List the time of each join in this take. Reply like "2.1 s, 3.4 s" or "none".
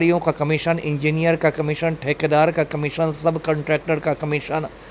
none